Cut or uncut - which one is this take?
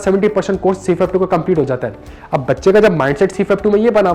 uncut